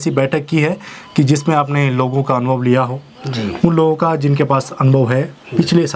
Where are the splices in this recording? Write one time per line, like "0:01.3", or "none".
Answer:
none